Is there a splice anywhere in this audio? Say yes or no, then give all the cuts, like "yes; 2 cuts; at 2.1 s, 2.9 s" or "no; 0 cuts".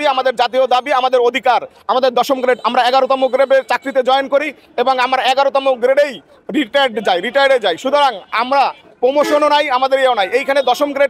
no; 0 cuts